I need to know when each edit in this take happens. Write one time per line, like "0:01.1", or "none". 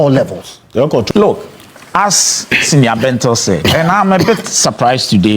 0:01.1